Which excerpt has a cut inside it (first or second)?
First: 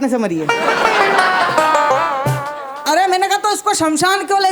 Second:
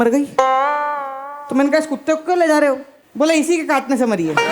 second